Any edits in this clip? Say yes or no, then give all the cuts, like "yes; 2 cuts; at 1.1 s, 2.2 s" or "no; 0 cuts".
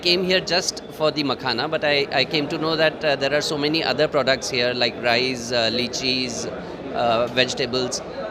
no; 0 cuts